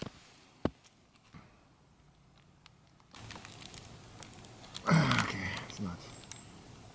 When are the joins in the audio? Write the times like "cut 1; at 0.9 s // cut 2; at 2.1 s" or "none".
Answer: cut 1; at 1.3 s // cut 2; at 3.2 s